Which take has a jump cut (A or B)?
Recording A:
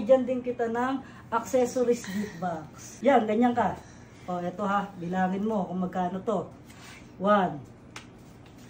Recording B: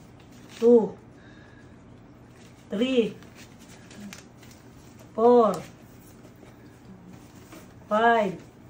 A